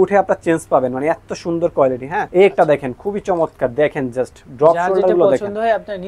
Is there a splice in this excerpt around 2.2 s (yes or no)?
yes